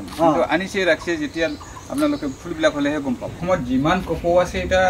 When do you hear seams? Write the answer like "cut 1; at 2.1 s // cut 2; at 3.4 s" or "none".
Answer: cut 1; at 3.4 s